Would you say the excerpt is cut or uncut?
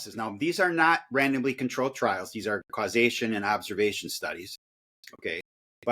uncut